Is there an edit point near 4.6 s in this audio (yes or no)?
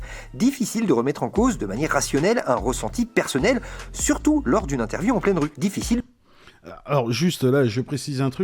no